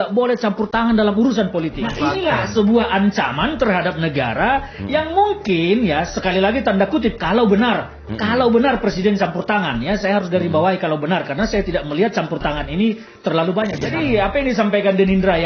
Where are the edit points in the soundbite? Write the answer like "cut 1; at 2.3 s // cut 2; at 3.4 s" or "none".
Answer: cut 1; at 1.8 s // cut 2; at 13.8 s